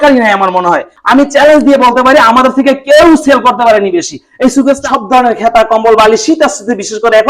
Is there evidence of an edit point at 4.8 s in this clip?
yes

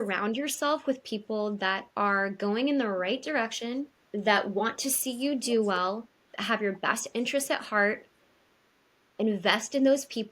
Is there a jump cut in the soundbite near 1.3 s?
no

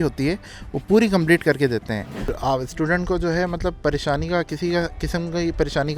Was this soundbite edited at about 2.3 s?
yes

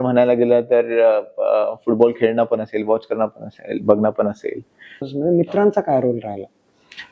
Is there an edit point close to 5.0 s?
yes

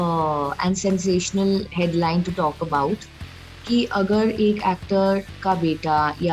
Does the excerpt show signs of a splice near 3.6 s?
yes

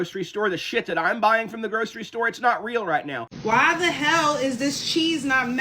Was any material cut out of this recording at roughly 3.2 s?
yes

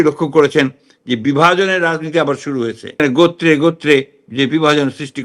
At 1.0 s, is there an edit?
no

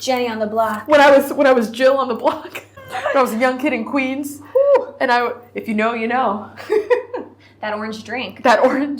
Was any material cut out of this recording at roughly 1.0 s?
no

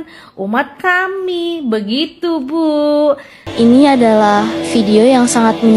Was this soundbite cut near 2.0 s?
no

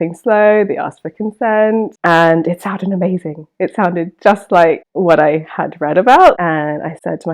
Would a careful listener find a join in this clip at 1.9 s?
yes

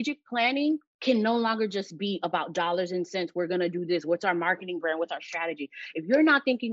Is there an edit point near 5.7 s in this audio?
no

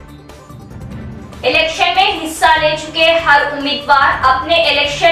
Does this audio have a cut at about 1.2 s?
no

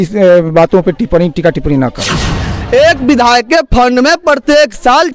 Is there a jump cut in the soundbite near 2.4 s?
yes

